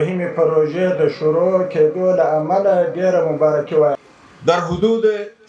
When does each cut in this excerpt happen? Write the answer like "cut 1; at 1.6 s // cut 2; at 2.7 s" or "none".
cut 1; at 4.0 s

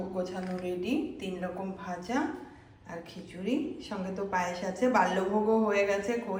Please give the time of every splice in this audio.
none

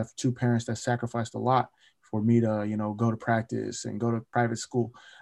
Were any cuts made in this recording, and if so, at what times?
cut 1; at 4.3 s

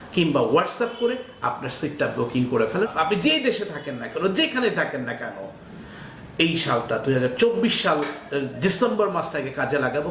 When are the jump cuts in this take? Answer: cut 1; at 2.9 s

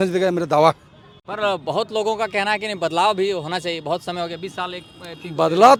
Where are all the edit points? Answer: none

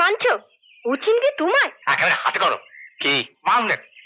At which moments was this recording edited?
cut 1; at 1.7 s

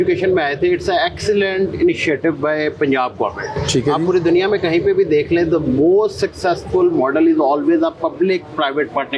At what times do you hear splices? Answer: none

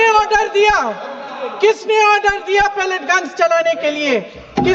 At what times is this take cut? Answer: none

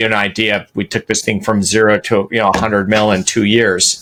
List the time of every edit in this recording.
none

